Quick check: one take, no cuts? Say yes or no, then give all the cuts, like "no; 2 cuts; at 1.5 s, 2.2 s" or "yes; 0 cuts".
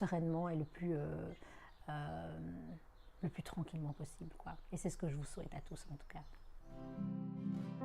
no; 1 cut; at 6.7 s